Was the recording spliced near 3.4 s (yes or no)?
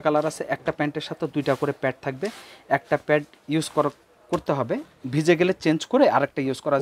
yes